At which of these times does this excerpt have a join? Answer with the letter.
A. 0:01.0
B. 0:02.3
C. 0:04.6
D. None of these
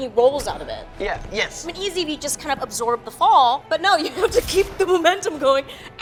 D